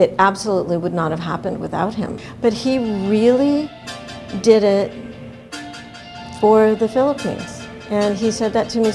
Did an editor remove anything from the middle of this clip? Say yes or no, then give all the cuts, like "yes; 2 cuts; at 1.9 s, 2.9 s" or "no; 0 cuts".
yes; 1 cut; at 2.2 s